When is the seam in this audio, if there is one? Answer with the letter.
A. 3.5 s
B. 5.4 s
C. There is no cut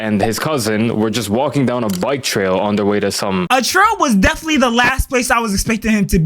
A